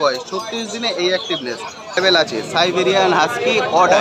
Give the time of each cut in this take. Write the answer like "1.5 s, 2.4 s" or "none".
2.0 s